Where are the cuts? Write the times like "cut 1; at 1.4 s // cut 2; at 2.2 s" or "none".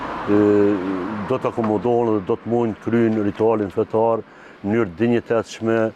none